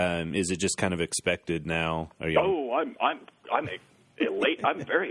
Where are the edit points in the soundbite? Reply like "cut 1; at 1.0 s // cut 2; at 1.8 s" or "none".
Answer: cut 1; at 2.1 s